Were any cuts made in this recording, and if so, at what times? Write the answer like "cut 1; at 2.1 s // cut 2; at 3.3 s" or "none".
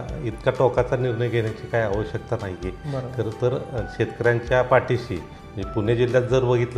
none